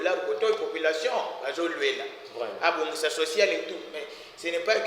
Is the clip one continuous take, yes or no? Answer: yes